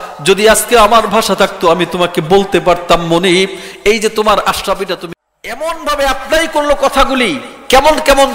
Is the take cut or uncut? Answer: cut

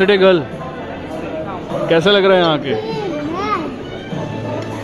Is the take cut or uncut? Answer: uncut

